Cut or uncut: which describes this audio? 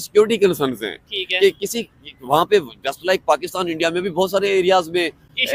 uncut